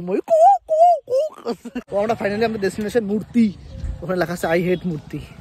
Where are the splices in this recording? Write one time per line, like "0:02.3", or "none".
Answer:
0:01.7